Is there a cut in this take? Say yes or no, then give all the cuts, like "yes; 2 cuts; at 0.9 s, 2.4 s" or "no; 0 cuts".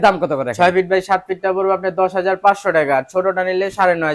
no; 0 cuts